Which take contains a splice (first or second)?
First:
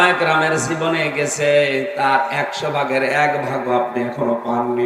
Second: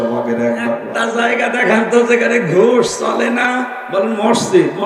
second